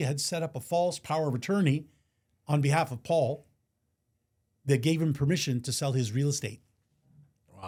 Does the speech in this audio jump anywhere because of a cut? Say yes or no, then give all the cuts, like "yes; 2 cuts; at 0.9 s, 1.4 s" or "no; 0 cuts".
no; 0 cuts